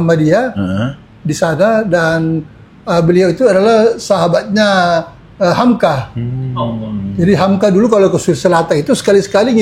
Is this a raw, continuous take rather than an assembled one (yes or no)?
yes